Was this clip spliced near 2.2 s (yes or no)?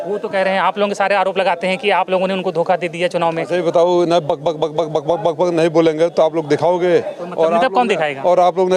no